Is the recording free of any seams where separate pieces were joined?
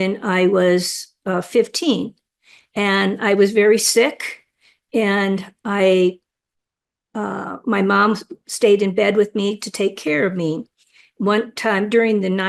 yes; 0 cuts

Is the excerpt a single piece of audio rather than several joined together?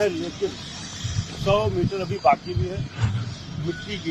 yes; 0 cuts

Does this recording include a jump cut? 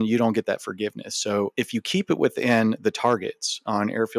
no; 0 cuts

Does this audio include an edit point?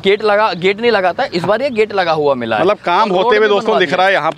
no; 0 cuts

